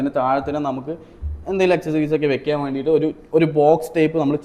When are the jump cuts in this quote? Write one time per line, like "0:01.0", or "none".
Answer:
none